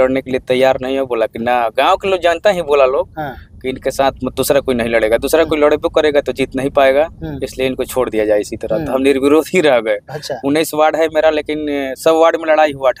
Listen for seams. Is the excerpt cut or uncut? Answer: uncut